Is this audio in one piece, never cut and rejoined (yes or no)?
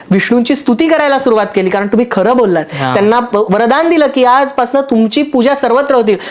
yes